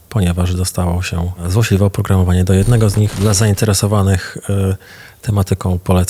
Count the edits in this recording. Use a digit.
2